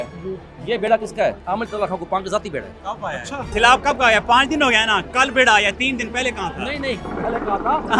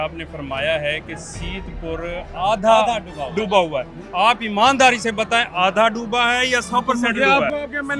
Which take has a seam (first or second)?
first